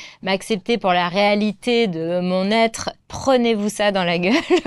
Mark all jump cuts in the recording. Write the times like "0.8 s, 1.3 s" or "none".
2.9 s